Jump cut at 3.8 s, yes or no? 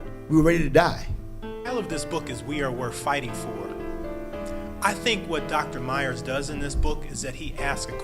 no